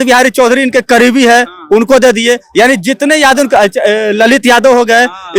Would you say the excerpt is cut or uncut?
uncut